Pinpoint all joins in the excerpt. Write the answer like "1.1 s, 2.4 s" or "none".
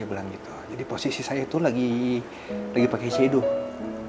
none